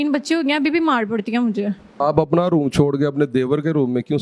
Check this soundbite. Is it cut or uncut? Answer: cut